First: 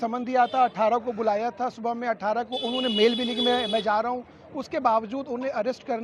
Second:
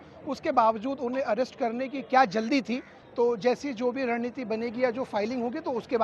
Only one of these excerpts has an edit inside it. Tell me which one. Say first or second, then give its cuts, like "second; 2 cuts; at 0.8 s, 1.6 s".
second; 1 cut; at 3.0 s